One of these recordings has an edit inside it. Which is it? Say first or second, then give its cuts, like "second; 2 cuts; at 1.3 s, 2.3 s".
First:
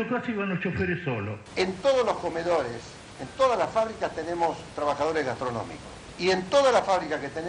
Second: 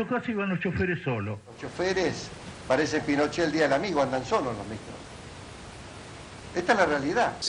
first; 1 cut; at 1.4 s